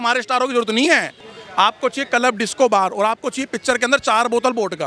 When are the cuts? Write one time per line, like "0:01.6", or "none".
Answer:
0:01.3